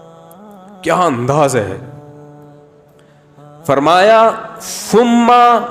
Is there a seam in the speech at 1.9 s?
yes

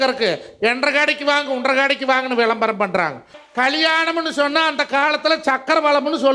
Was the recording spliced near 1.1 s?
no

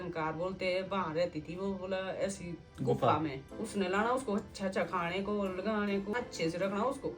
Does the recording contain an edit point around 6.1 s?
yes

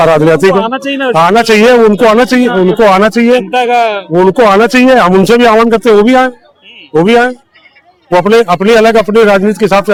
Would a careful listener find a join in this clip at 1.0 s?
no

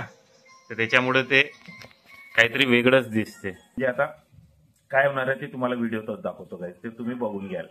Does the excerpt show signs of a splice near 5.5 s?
no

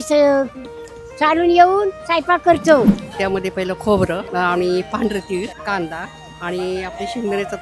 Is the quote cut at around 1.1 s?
no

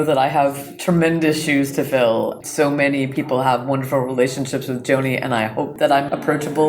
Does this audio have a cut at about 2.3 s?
yes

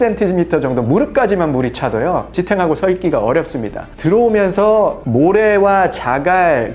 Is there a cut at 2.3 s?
no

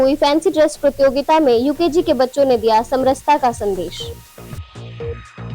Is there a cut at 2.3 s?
no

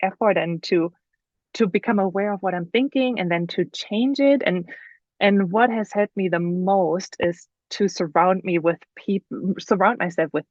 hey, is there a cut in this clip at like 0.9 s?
no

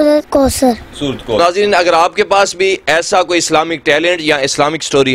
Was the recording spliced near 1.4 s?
yes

